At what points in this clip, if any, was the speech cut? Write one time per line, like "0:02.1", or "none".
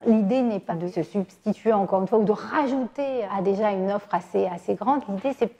0:00.9
0:03.3